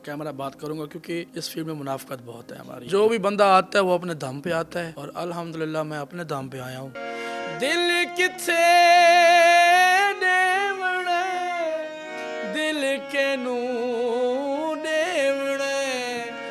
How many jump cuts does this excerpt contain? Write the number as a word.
four